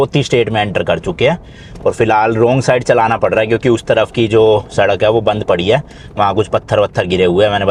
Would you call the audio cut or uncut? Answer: uncut